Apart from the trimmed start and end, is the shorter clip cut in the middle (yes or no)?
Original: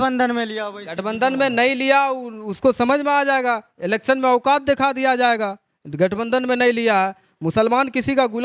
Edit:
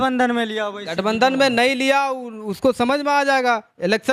no